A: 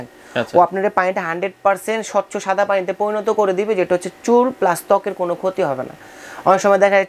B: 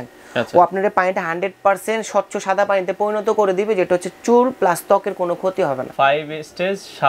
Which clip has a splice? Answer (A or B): B